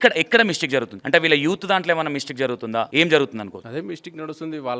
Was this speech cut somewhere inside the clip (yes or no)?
yes